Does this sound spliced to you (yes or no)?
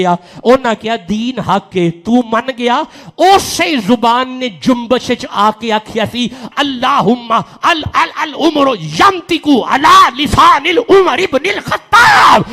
yes